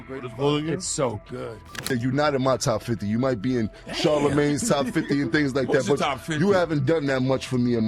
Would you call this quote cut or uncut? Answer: cut